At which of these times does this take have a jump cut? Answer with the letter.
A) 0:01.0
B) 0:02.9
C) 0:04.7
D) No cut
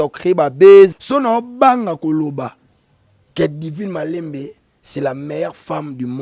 A